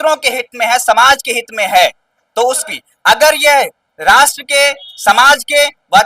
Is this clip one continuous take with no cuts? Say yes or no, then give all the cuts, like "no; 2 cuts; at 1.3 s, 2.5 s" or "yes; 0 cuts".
no; 1 cut; at 2.7 s